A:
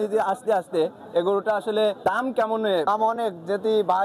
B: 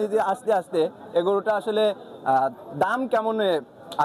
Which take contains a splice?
A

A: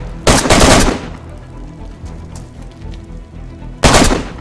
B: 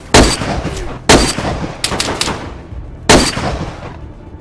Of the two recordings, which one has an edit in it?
B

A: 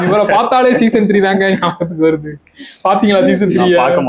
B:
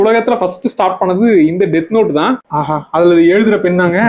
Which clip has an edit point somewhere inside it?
B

